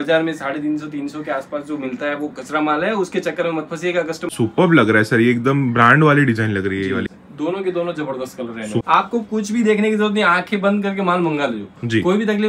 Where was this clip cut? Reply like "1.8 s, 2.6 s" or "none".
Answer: 4.3 s, 7.2 s, 8.8 s

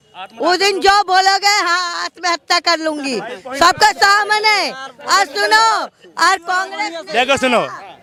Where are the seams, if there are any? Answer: none

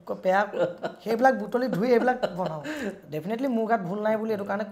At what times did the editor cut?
2.9 s

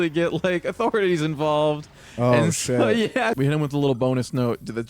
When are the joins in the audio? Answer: 3.4 s

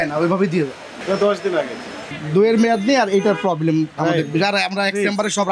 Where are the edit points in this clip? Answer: 1.0 s, 2.2 s

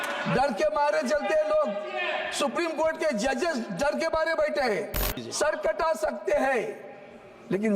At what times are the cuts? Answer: 5.2 s

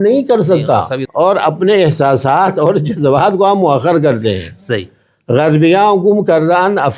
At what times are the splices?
1.0 s

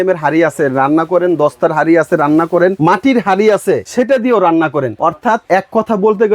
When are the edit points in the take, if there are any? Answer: 2.8 s, 3.9 s, 5.2 s

